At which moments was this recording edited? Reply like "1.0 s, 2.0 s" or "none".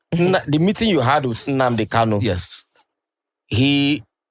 none